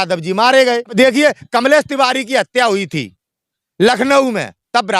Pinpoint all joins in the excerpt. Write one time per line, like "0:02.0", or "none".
0:00.9